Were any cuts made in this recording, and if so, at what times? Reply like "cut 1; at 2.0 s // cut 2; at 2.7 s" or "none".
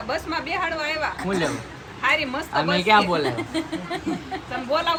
none

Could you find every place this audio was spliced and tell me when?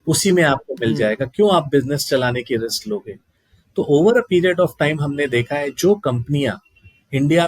none

